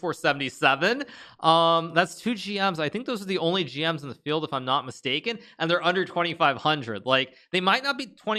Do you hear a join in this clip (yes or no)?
no